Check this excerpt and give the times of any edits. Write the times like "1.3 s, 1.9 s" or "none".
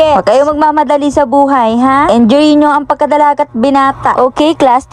none